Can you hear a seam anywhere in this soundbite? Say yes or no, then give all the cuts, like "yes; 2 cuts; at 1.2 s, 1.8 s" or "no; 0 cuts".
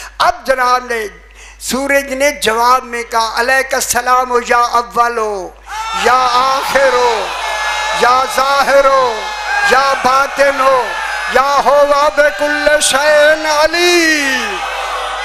no; 0 cuts